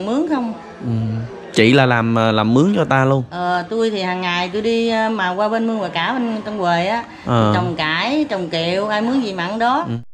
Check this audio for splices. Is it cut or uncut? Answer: uncut